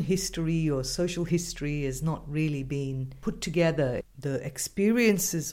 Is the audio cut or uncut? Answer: cut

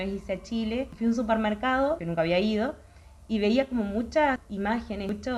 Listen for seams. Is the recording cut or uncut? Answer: cut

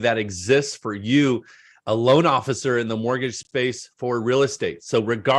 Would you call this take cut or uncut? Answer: uncut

